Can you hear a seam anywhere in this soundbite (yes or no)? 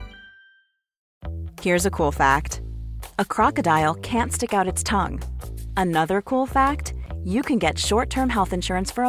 yes